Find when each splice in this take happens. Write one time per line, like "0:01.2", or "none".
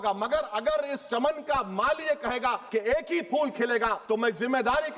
0:02.6
0:04.0